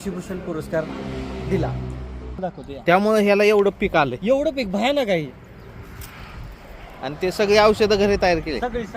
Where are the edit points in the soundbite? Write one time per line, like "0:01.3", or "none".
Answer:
0:02.4